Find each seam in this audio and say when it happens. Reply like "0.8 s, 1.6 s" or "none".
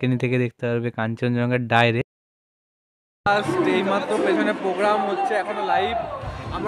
2.8 s

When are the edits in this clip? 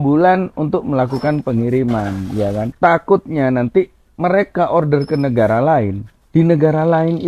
2.7 s

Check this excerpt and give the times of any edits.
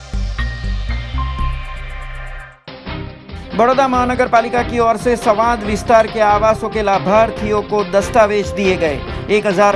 3.0 s

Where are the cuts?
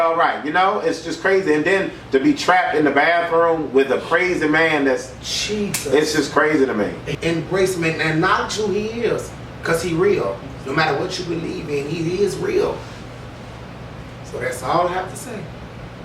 7.0 s

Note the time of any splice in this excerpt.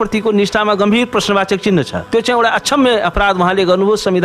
2.0 s

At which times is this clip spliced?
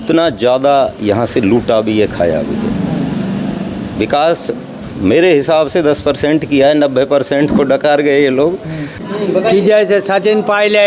9.1 s

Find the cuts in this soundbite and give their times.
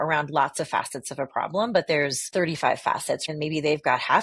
3.3 s

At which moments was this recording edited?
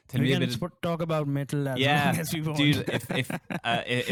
none

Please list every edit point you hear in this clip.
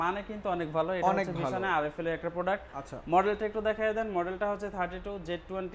none

